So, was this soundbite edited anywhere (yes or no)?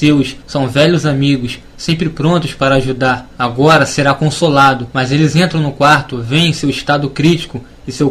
no